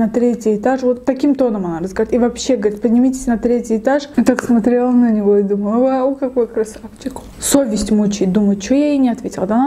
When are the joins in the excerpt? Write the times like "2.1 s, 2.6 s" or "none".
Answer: 4.1 s, 7.4 s